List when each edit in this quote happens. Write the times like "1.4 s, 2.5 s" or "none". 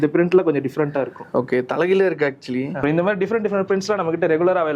2.8 s